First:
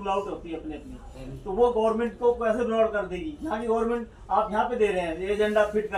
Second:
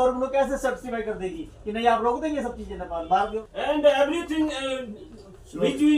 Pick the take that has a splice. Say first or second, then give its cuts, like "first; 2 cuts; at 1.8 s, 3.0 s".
second; 1 cut; at 3.4 s